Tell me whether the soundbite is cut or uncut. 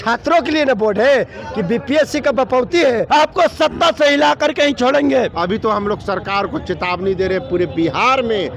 cut